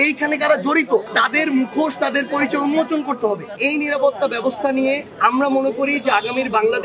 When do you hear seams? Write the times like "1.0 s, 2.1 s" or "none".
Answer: 1.1 s, 3.6 s, 5.1 s